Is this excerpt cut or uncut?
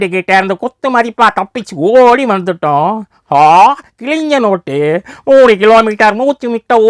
uncut